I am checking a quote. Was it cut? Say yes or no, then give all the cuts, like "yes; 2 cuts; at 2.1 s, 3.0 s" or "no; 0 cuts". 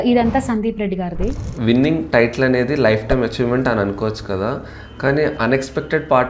yes; 1 cut; at 1.4 s